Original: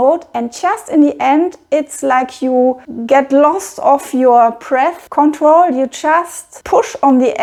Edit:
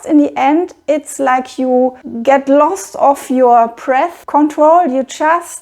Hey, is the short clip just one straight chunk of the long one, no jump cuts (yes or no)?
yes